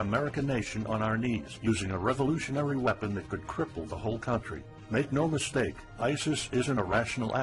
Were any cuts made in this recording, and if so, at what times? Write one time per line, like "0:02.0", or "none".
0:02.7